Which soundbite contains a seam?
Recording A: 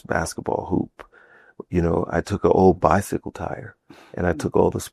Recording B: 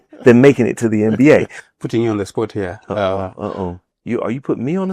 B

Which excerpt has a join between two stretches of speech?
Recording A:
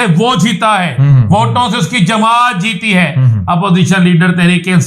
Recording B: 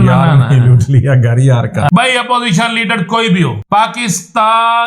B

